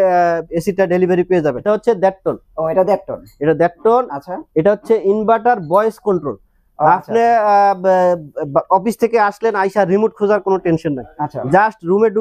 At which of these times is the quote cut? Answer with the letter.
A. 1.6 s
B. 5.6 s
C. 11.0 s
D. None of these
A